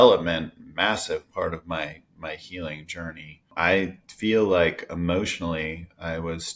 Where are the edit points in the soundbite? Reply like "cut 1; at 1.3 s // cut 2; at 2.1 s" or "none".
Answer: cut 1; at 3.5 s